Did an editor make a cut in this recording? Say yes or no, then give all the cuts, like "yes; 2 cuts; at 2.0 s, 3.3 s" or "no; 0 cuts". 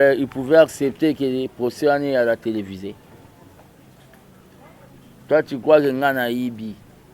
no; 0 cuts